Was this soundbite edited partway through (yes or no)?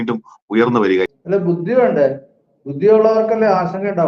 yes